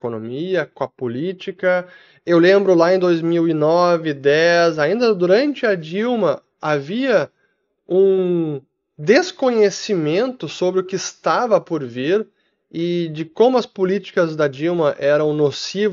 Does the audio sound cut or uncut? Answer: uncut